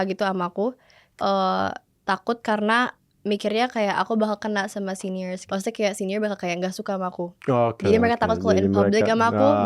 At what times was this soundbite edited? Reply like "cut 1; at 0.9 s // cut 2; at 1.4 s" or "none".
cut 1; at 1.0 s // cut 2; at 5.4 s